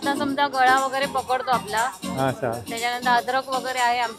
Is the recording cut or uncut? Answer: uncut